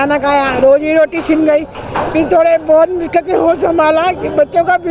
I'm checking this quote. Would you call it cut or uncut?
uncut